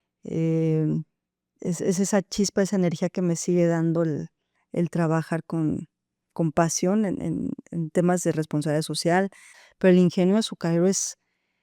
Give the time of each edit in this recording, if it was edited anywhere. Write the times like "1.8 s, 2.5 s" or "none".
9.5 s